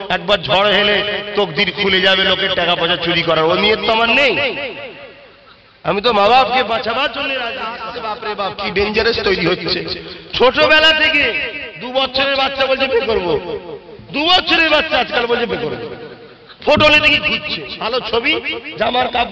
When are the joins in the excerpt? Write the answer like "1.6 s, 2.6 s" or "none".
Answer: 7.9 s